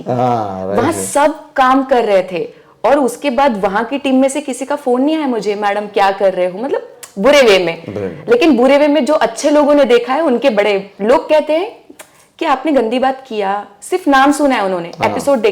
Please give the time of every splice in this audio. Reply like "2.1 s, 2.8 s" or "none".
10.9 s